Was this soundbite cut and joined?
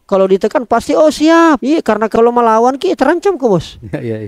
yes; 1 cut; at 2.0 s

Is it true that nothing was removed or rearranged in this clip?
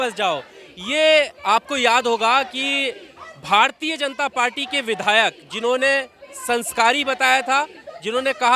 yes; 0 cuts

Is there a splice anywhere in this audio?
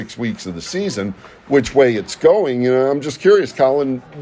no; 0 cuts

